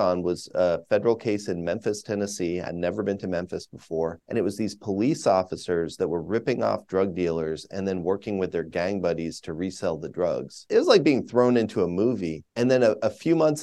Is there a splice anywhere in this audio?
no; 0 cuts

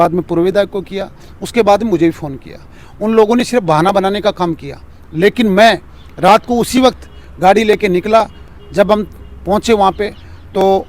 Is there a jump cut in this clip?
no; 0 cuts

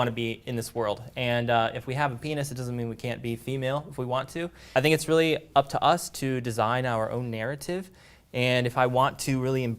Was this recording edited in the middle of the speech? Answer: yes; 1 cut; at 4.6 s

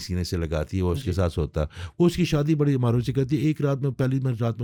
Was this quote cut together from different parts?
no; 0 cuts

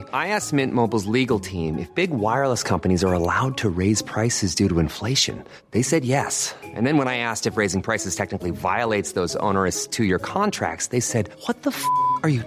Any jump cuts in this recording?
no; 0 cuts

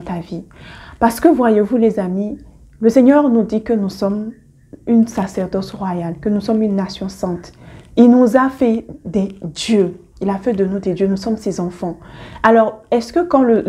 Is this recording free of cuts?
yes; 0 cuts

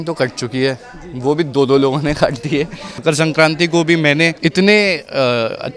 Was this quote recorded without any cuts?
no; 2 cuts; at 2.9 s, 4.3 s

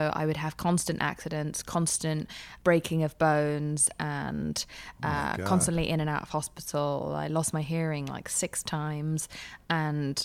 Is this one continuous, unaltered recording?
no; 1 cut; at 2.4 s

